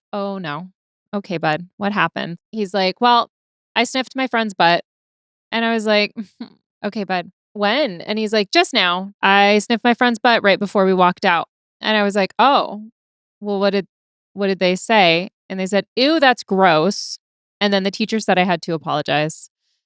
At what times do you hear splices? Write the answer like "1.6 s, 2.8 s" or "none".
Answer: 2.3 s, 6.7 s, 7.4 s, 9.1 s